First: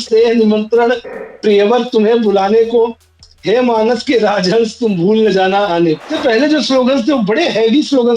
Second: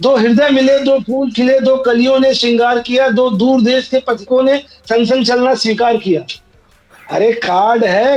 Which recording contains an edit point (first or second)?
first